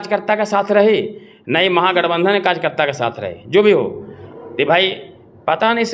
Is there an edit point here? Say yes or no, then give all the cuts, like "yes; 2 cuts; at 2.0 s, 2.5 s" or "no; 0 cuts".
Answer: no; 0 cuts